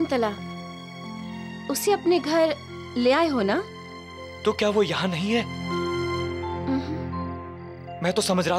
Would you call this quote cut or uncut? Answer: uncut